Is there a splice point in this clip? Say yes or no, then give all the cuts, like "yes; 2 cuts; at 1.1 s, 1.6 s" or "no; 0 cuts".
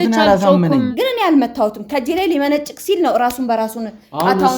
yes; 1 cut; at 0.9 s